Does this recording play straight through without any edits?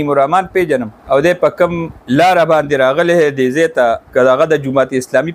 no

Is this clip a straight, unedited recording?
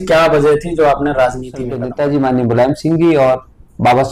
no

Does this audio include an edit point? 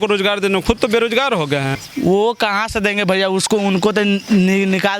yes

